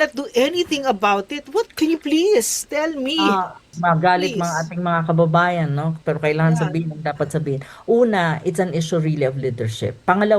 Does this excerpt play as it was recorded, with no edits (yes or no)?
no